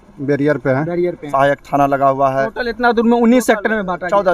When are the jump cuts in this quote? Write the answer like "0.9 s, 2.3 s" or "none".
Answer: 1.3 s

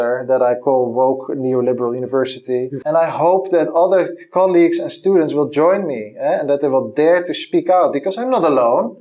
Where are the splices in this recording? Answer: 2.8 s

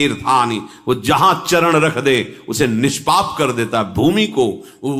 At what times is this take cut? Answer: none

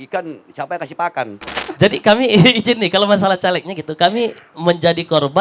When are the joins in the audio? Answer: 1.6 s

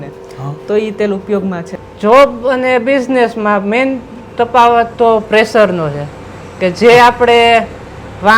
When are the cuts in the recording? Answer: 1.8 s

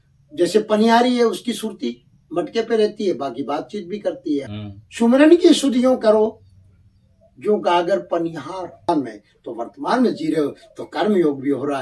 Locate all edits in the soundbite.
4.6 s, 8.9 s

